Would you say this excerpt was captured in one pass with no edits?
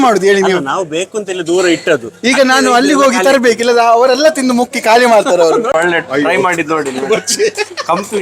no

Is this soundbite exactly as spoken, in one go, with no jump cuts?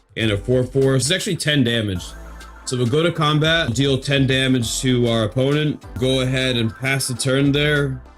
no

